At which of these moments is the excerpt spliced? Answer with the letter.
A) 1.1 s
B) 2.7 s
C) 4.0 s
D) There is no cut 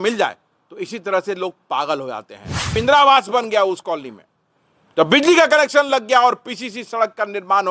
B